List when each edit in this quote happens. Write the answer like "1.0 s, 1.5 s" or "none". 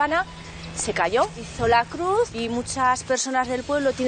1.5 s, 2.3 s